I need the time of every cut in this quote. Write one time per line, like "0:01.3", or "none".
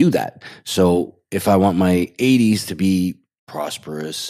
0:03.3